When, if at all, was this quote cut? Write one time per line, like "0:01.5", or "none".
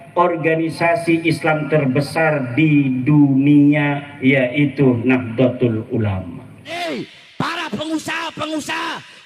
0:06.5